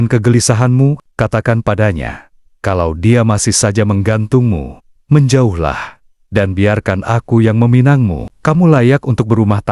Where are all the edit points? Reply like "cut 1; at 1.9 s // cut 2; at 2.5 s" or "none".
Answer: cut 1; at 1.0 s